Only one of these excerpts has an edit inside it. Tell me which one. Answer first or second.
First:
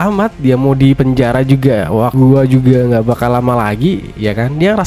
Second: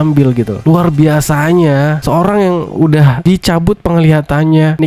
first